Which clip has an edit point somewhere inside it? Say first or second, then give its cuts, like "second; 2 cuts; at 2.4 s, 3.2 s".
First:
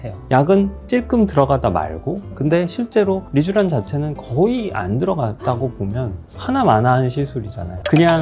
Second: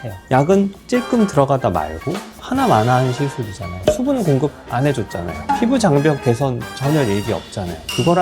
second; 2 cuts; at 2.3 s, 3.7 s